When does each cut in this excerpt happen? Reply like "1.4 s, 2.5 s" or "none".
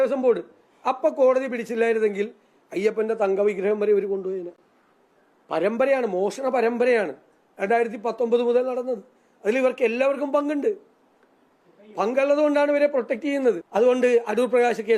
13.6 s